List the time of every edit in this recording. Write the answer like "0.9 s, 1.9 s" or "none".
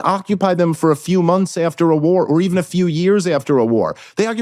none